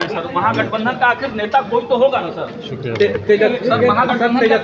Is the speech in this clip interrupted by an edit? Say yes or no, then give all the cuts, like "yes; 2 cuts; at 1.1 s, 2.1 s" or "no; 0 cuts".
no; 0 cuts